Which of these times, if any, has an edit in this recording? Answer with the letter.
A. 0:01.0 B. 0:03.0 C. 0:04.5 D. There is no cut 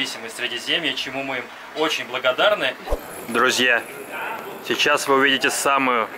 B